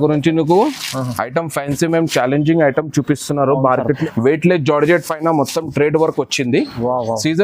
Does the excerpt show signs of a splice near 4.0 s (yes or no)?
yes